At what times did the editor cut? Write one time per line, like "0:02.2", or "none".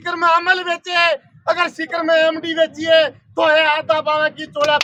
none